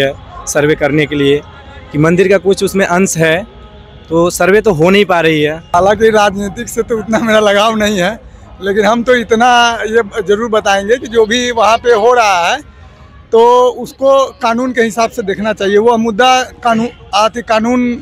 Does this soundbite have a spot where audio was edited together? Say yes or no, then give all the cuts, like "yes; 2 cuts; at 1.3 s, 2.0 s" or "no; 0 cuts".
yes; 1 cut; at 5.6 s